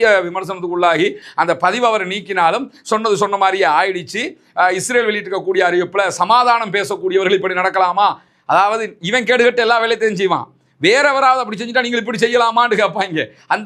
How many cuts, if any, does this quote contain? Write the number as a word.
zero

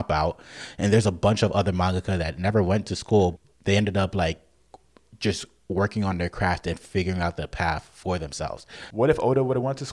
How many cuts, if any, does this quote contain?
two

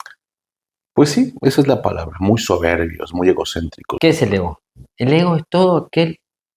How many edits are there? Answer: one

